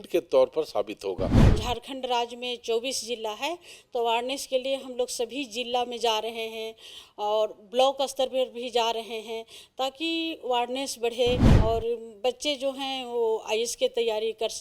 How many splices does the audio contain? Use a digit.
2